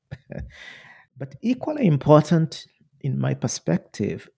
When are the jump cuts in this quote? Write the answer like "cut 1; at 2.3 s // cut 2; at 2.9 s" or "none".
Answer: cut 1; at 1.3 s